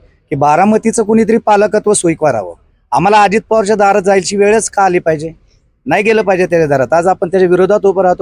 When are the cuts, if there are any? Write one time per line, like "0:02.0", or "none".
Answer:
none

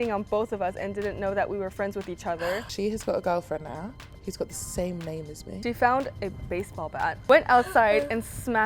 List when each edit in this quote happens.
0:02.7
0:04.0
0:05.4
0:07.2

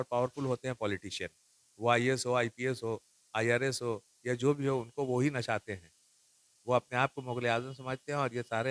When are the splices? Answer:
none

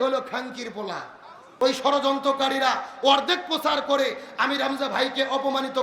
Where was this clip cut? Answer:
0:01.4

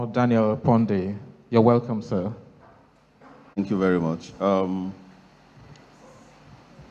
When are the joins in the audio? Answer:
0:03.5

